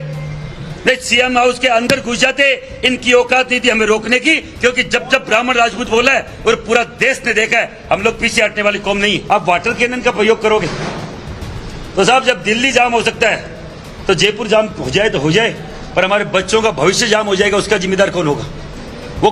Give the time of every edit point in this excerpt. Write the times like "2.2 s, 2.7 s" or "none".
9.2 s